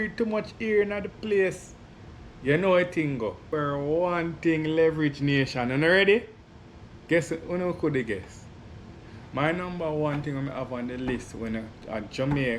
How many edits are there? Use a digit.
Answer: 1